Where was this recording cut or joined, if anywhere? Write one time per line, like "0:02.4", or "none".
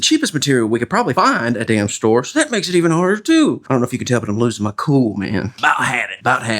0:05.6